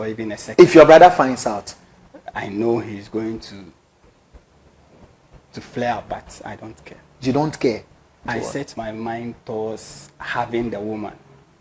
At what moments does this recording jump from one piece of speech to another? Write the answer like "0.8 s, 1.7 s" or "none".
8.2 s